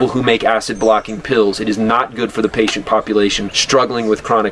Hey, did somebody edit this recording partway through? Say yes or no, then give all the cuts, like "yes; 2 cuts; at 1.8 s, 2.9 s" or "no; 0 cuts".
yes; 1 cut; at 3.5 s